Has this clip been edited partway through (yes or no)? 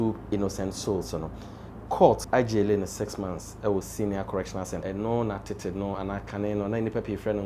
yes